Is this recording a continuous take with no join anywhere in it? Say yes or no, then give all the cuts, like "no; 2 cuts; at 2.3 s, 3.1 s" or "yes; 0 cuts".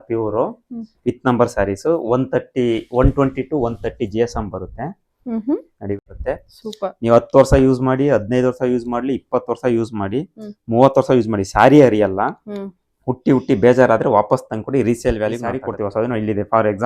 no; 2 cuts; at 6.0 s, 15.7 s